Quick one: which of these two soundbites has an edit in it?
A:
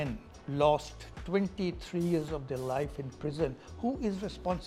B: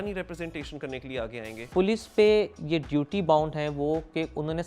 B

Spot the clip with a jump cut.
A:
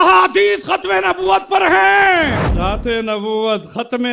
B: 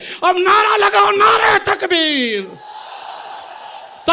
A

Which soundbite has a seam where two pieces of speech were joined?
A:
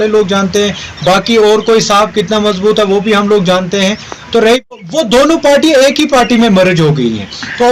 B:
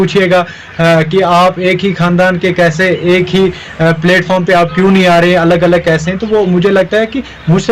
A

